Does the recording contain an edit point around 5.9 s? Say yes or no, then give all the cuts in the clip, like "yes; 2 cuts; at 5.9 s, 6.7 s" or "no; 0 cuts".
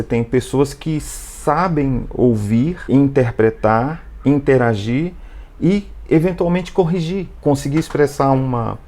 no; 2 cuts; at 2.9 s, 7.3 s